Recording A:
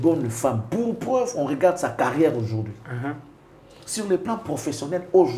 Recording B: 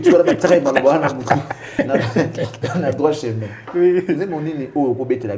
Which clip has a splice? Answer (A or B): B